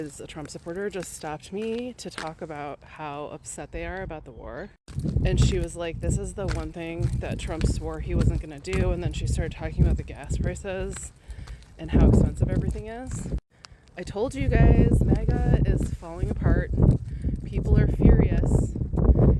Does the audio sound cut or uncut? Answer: uncut